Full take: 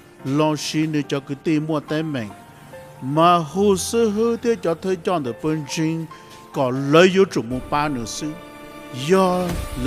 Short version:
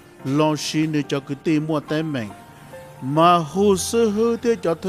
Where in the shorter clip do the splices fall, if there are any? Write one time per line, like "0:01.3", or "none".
none